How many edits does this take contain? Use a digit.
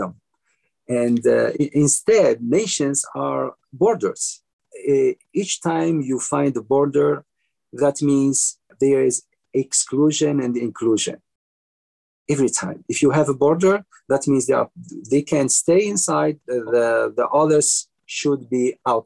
3